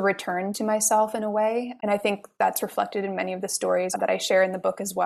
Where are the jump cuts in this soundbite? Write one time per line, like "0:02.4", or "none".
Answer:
0:03.9

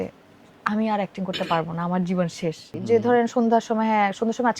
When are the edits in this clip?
0:02.7

